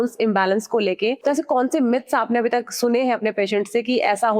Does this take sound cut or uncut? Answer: cut